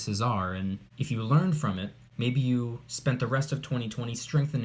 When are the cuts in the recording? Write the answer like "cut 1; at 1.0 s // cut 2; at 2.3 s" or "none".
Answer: cut 1; at 0.9 s // cut 2; at 2.0 s